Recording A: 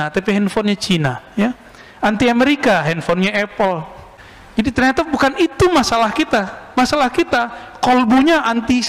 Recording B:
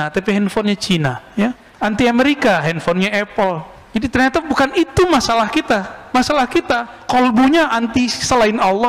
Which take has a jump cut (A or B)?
B